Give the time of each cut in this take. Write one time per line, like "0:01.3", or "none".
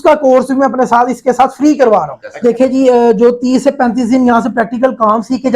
0:02.2